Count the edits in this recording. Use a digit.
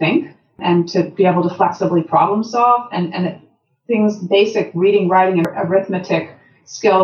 1